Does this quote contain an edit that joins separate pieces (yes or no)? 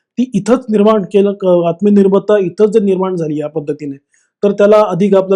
no